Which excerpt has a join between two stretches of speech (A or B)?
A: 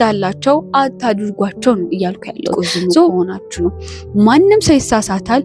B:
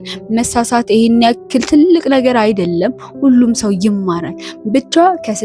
A